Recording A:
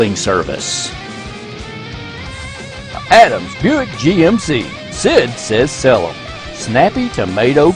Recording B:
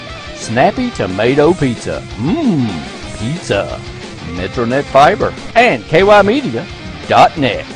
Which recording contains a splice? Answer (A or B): B